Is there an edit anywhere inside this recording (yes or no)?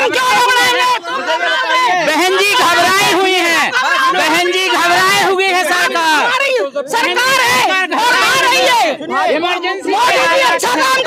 no